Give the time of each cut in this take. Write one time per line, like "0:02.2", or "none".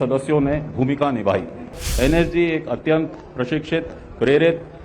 0:01.8

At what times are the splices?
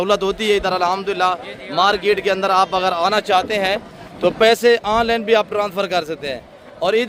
none

